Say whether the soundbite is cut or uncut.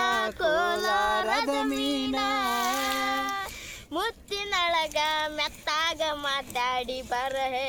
uncut